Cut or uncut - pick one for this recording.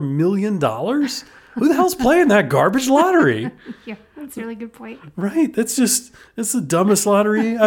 uncut